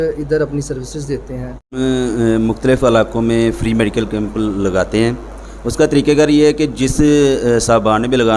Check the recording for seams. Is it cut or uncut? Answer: cut